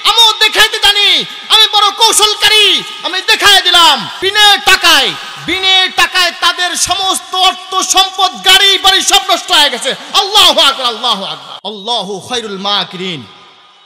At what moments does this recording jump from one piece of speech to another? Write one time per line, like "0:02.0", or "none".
0:04.1
0:11.5